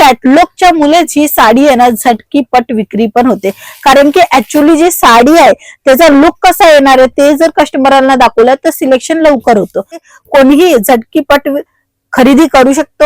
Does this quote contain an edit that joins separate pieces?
yes; 1 cut; at 10.0 s

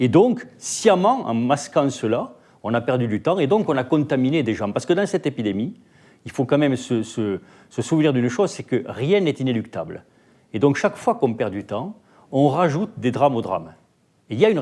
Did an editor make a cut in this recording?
no; 0 cuts

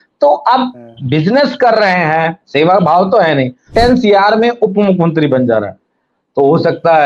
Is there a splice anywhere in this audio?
yes; 1 cut; at 3.7 s

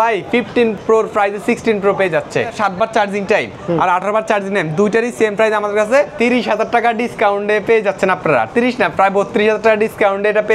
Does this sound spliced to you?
yes; 3 cuts; at 0.8 s, 2.5 s, 6.1 s

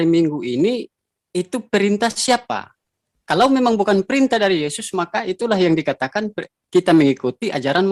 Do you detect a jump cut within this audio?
no; 0 cuts

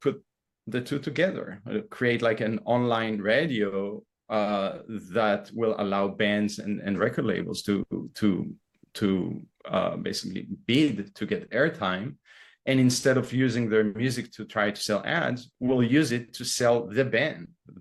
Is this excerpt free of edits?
yes; 0 cuts

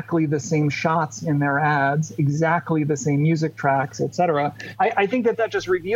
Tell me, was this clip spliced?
yes; 1 cut; at 4.7 s

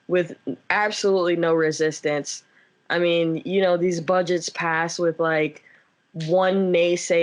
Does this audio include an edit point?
no; 0 cuts

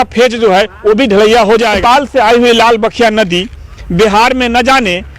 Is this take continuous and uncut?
no; 1 cut; at 1.8 s

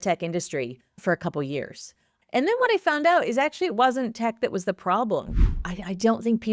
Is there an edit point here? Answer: yes; 2 cuts; at 2.1 s, 5.6 s

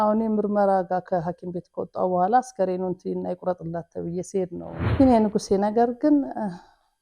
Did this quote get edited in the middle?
yes; 1 cut; at 4.8 s

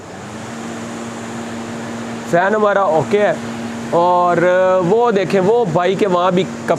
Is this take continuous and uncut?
yes; 0 cuts

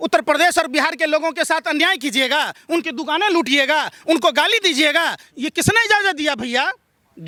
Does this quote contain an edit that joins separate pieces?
no; 0 cuts

